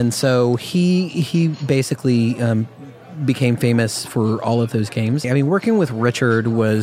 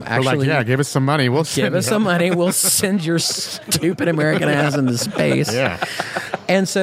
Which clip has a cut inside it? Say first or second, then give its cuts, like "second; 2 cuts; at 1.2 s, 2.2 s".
first; 1 cut; at 5.2 s